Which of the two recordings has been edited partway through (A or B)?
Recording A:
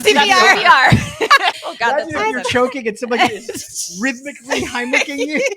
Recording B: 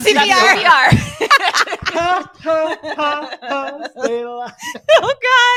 A